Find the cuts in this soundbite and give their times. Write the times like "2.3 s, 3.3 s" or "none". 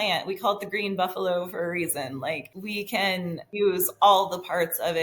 3.1 s